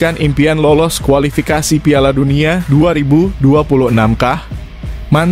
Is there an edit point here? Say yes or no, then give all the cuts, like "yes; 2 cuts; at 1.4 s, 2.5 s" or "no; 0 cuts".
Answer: no; 0 cuts